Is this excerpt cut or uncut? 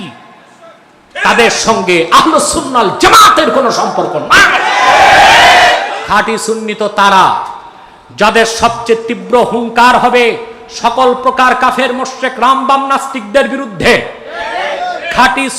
cut